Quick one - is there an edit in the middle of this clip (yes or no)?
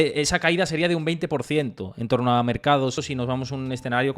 yes